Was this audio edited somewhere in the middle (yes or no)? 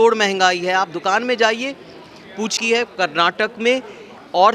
yes